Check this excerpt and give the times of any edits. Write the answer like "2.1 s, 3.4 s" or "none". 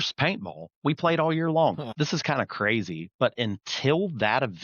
1.9 s

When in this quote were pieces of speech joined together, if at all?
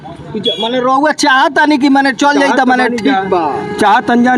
none

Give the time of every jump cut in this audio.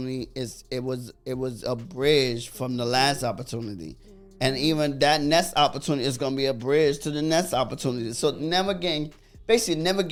none

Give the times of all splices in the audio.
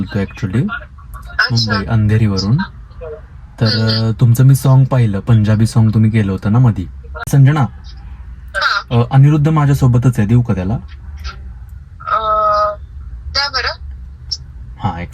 7.3 s

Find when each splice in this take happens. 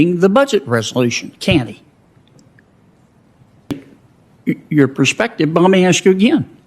3.7 s

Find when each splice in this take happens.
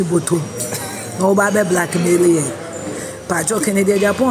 none

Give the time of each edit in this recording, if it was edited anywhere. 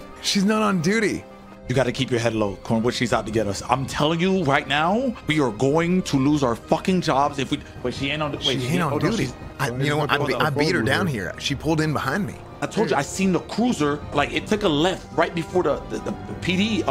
1.5 s, 9.4 s, 12.4 s, 14.1 s

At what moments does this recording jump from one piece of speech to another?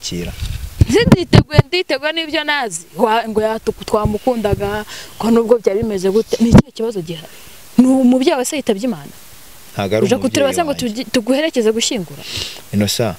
none

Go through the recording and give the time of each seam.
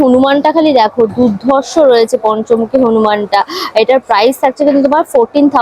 none

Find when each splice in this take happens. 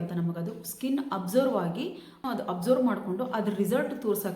2.2 s

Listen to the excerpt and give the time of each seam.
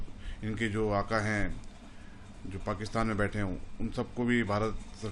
none

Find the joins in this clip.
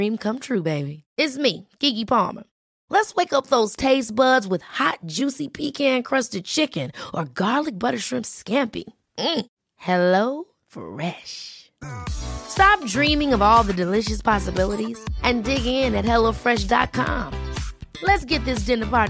none

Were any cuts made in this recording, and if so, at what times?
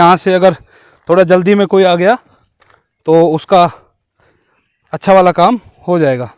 none

